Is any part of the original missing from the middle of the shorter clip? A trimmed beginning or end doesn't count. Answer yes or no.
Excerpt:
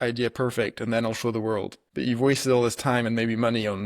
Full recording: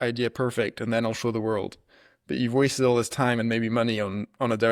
yes